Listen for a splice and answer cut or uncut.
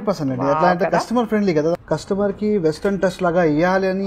cut